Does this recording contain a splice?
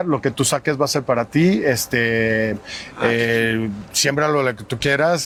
no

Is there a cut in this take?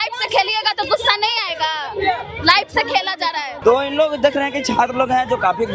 no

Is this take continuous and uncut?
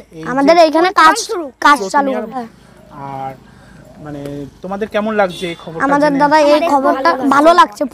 no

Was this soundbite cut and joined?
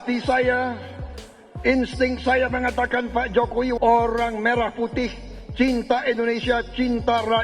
yes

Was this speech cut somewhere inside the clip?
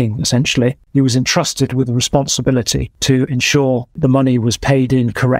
yes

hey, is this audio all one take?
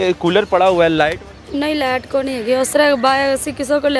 no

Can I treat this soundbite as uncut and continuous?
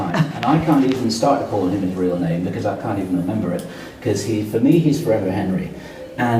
yes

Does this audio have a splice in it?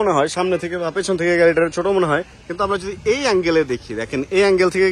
yes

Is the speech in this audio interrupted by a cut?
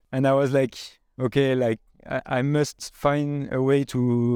no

